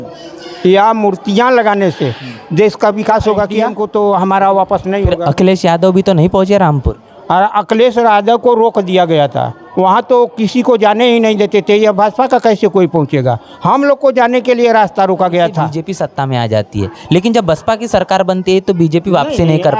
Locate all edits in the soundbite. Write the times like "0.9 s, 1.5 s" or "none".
3.7 s, 15.8 s